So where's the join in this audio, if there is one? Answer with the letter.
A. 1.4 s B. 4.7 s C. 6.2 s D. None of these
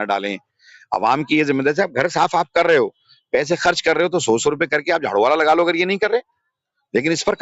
D